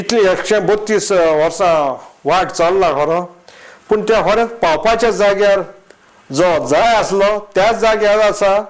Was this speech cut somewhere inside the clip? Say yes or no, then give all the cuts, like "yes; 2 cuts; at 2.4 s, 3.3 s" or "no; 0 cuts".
no; 0 cuts